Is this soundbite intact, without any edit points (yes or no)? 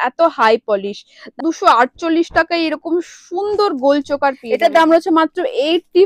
no